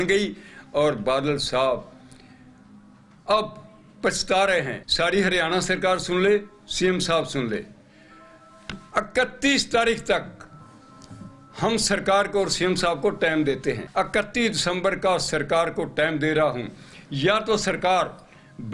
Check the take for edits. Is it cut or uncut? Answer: cut